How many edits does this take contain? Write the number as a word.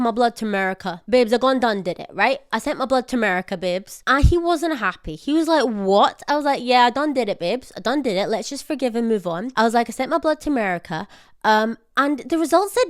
zero